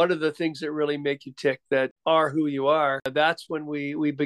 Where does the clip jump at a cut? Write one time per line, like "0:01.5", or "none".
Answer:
0:01.9
0:03.1